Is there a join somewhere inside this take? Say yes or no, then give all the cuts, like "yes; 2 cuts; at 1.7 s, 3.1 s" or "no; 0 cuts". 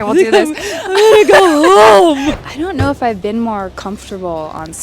yes; 2 cuts; at 2.3 s, 3.2 s